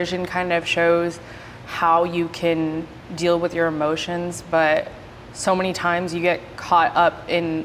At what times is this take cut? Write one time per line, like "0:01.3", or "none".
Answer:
none

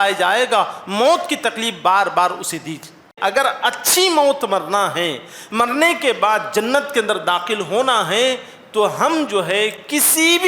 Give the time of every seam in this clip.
0:03.2

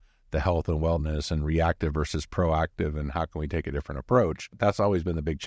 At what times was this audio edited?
0:04.6

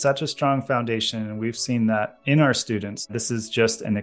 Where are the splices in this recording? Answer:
0:03.1

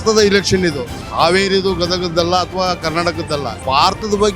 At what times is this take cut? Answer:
0:01.0
0:03.6

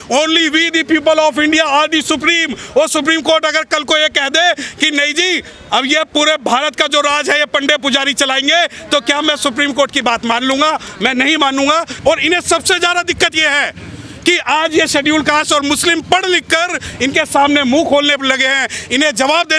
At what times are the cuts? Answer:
0:11.9

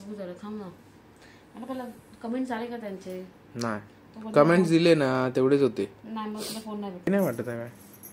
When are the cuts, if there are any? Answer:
0:07.1

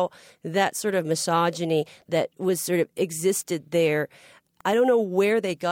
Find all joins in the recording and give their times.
0:02.0

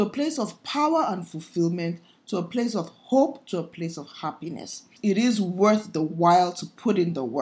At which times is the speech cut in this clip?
0:04.9

